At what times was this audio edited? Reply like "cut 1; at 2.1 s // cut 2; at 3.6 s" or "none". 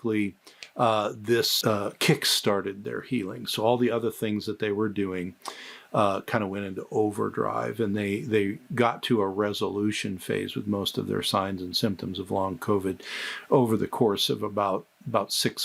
none